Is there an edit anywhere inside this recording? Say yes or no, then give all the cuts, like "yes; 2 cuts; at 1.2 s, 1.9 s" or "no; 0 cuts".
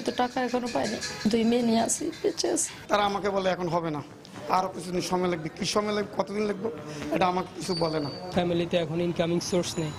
yes; 2 cuts; at 2.7 s, 8.3 s